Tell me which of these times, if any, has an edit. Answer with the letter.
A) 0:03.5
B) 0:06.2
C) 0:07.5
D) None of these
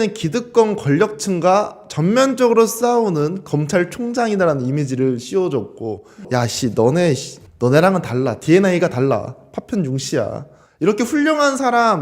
B